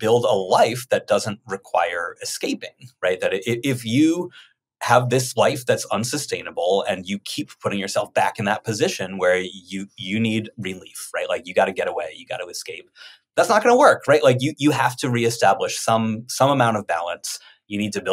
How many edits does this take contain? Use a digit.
0